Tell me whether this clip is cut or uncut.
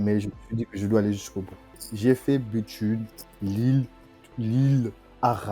cut